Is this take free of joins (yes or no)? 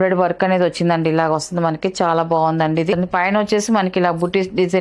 no